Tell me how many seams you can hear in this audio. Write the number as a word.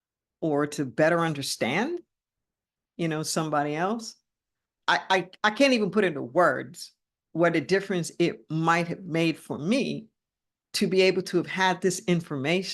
one